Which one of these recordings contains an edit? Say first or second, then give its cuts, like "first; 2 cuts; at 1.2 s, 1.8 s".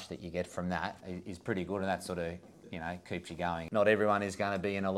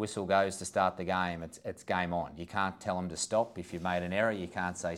first; 2 cuts; at 1.1 s, 3.6 s